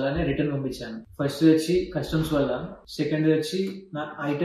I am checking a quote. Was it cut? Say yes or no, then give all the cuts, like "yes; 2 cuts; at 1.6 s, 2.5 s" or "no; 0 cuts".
yes; 1 cut; at 2.8 s